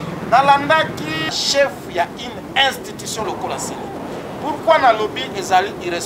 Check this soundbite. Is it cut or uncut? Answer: cut